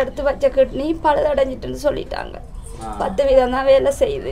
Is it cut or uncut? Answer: uncut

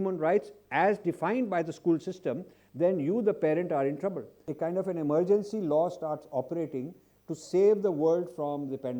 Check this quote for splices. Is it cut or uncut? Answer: cut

